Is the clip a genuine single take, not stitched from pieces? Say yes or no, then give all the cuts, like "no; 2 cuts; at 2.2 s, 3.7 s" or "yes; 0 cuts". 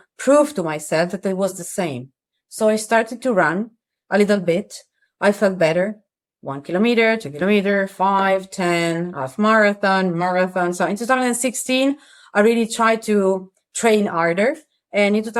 yes; 0 cuts